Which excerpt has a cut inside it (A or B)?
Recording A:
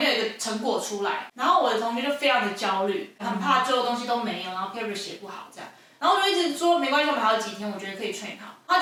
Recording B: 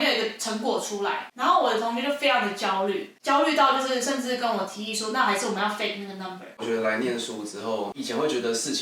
B